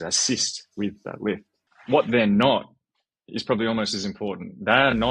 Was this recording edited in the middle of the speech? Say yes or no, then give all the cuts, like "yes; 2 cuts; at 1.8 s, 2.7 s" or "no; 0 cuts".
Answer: no; 0 cuts